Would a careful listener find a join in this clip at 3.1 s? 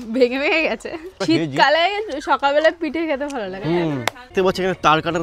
no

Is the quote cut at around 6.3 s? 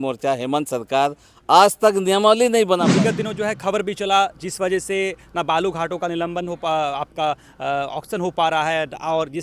no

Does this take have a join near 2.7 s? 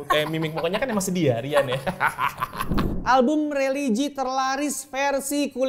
yes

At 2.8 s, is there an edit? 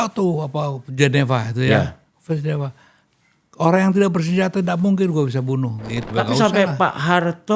no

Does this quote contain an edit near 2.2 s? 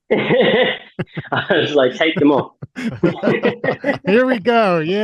no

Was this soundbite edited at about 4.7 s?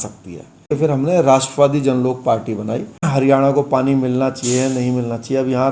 no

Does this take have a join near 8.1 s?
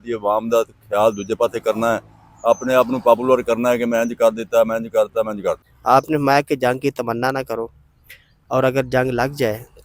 no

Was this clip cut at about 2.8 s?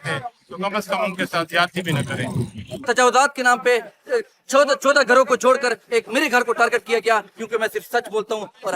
yes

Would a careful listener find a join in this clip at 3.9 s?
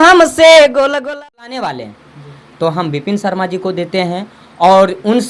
no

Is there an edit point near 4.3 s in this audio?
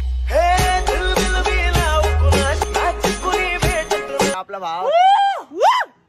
yes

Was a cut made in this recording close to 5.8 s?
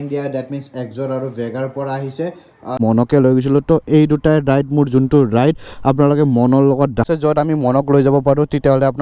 no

